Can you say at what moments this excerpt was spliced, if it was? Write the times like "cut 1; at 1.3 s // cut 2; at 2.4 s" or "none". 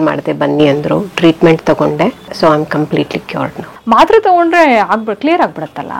cut 1; at 2.3 s // cut 2; at 3.7 s